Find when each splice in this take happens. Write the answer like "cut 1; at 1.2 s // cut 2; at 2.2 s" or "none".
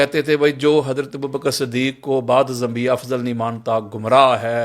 none